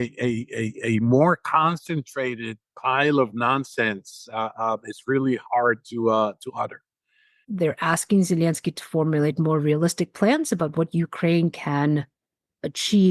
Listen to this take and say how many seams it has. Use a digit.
1